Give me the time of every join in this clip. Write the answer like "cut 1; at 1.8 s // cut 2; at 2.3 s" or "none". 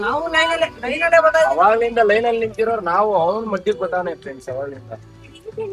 none